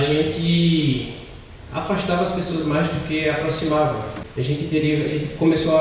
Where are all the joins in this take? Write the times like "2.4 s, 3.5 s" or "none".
4.2 s